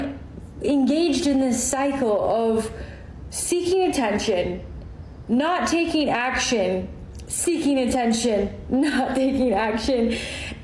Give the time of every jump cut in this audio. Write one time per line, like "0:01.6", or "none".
0:08.6

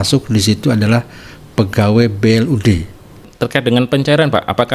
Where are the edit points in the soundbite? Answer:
0:03.3

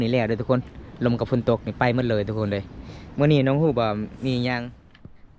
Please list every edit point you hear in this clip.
none

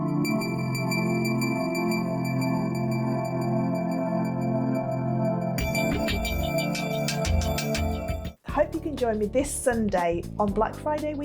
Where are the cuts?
0:08.3

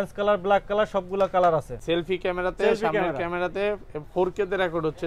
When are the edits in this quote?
0:01.7

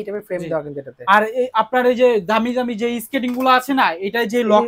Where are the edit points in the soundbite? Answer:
none

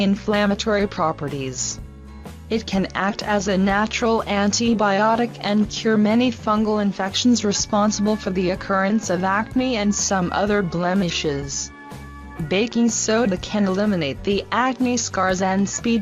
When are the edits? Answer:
0:01.2
0:14.1

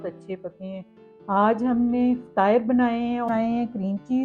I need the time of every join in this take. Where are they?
0:01.1
0:03.3

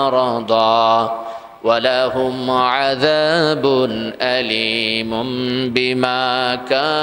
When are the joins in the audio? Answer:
none

